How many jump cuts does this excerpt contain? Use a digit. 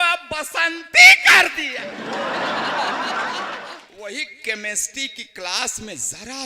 2